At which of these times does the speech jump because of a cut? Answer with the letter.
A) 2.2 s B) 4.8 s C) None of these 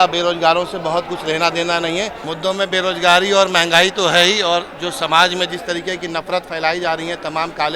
A